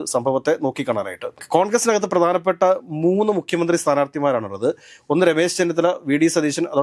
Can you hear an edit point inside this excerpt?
no; 0 cuts

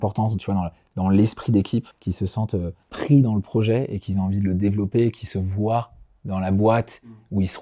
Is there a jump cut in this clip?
yes; 2 cuts; at 1.9 s, 2.8 s

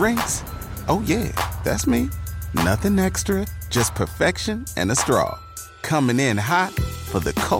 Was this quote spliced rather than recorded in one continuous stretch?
no; 0 cuts

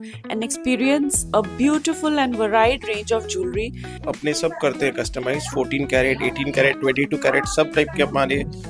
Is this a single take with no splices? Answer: no; 1 cut; at 4.0 s

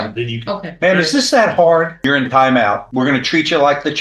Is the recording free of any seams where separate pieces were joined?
no; 2 cuts; at 1.9 s, 2.8 s

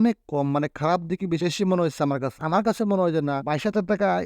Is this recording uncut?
no; 1 cut; at 2.4 s

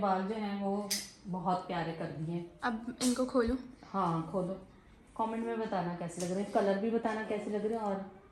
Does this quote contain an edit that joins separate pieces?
no; 0 cuts

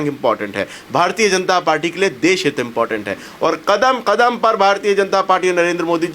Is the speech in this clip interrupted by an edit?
no; 0 cuts

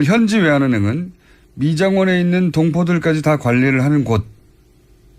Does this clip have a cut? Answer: yes; 1 cut; at 4.3 s

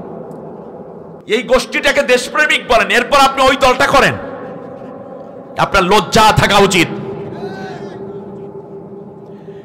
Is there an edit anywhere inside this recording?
yes; 1 cut; at 1.1 s

